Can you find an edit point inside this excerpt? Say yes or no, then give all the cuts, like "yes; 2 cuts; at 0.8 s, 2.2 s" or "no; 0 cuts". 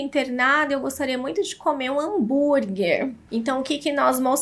yes; 1 cut; at 3.2 s